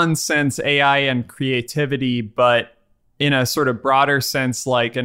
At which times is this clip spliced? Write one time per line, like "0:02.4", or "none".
none